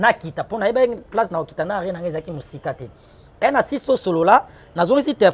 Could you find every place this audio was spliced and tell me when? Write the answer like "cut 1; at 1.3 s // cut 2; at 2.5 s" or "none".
none